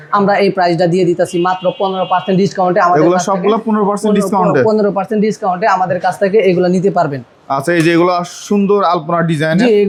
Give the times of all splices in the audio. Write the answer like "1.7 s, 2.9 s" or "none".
none